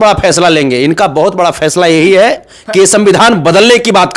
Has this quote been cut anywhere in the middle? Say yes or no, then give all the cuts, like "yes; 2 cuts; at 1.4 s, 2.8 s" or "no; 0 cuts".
no; 0 cuts